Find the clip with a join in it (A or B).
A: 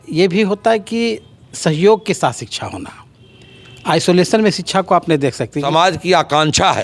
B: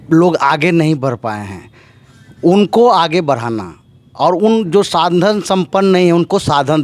A